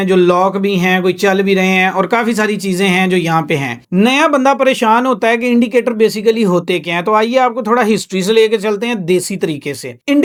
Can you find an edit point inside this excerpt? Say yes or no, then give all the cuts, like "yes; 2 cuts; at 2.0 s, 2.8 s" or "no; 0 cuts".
no; 0 cuts